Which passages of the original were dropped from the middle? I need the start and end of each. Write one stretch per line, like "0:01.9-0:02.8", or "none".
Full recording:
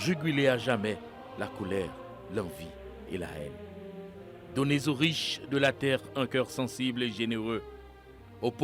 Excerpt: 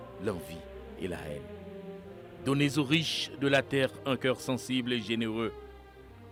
none